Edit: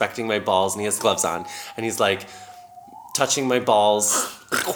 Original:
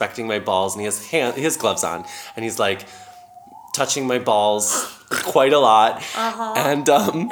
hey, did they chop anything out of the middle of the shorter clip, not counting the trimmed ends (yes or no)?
yes